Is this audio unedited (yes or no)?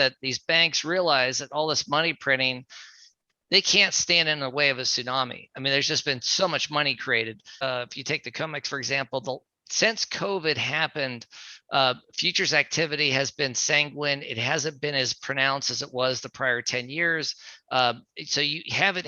no